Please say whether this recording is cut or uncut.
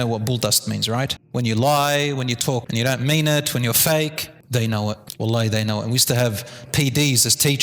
cut